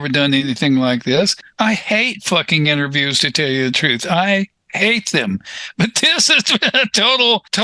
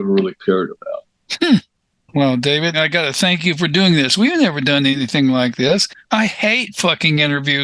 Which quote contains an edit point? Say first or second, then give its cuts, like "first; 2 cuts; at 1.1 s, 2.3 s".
second; 2 cuts; at 1.8 s, 2.8 s